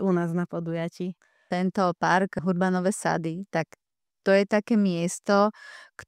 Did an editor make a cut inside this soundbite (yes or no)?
yes